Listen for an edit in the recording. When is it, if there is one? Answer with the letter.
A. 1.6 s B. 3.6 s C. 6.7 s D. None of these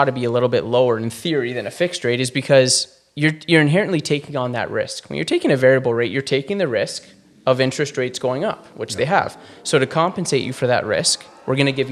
D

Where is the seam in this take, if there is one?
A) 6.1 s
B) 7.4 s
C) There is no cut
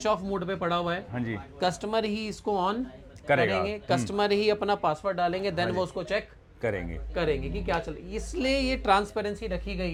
C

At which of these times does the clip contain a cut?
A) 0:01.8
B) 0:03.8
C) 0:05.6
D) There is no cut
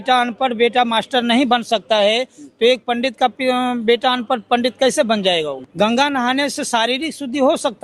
C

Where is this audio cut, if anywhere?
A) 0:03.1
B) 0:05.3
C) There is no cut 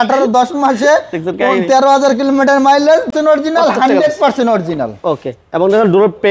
A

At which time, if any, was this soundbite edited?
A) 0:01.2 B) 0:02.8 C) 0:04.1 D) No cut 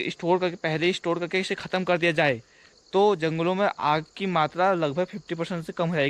D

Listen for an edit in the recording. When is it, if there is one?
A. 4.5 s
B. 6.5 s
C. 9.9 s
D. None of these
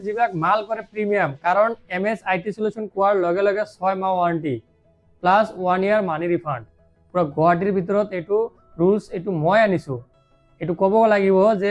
D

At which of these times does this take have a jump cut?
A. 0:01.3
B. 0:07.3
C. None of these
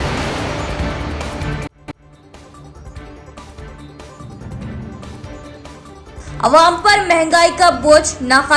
A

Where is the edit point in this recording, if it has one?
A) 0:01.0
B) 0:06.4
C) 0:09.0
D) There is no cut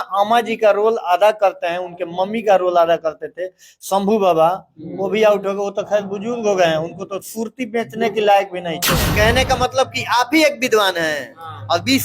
C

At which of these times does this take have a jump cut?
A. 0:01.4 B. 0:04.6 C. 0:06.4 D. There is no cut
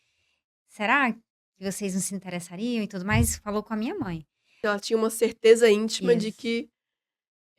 B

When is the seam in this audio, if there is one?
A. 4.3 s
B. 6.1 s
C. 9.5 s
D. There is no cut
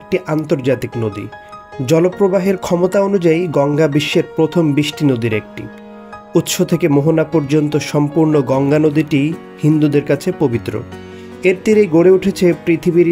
D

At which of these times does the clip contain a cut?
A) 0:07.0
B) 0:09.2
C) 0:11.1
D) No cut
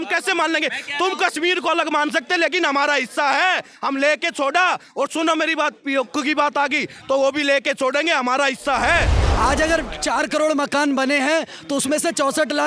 B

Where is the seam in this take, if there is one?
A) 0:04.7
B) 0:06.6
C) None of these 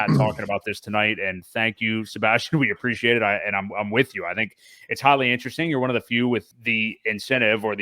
B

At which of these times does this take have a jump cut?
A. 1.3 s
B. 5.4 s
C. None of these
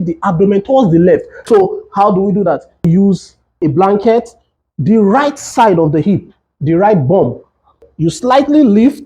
A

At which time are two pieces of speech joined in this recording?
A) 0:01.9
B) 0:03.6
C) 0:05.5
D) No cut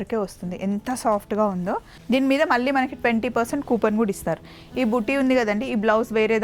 A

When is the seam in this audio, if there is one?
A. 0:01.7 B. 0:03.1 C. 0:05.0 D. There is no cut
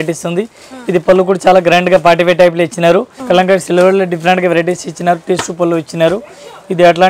B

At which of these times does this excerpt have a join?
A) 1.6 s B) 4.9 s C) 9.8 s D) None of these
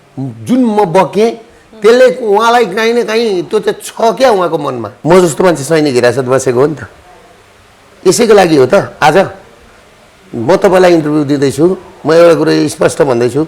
B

